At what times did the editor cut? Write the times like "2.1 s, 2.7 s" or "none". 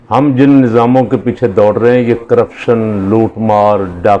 none